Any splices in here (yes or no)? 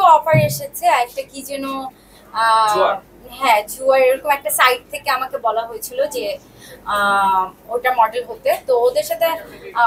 no